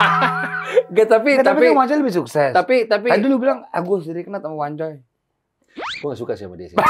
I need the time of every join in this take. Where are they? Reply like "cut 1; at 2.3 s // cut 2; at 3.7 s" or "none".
none